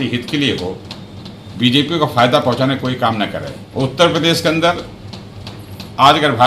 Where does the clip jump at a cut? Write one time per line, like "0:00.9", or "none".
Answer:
0:03.6